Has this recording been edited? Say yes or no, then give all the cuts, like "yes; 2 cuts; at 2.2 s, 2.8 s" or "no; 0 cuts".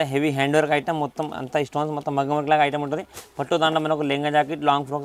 no; 0 cuts